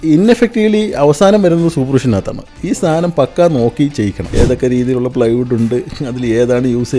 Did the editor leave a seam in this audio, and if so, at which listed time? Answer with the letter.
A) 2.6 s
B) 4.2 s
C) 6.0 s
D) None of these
B